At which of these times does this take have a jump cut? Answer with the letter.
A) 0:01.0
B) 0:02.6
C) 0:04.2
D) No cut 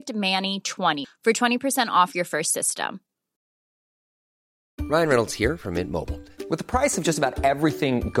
D